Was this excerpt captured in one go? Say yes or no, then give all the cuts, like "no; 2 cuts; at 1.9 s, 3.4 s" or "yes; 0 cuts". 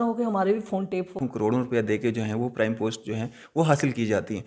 no; 1 cut; at 1.2 s